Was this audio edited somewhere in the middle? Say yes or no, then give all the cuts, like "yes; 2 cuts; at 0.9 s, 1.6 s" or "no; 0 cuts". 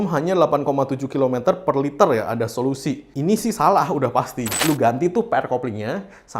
yes; 1 cut; at 4.5 s